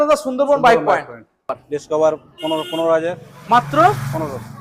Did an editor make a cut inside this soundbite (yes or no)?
yes